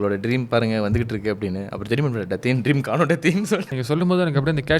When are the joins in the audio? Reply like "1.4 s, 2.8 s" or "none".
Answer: 3.7 s